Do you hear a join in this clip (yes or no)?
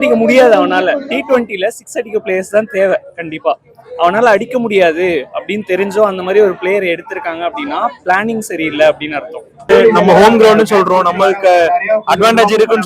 yes